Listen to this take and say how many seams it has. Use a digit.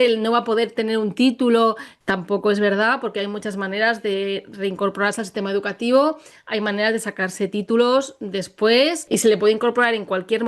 2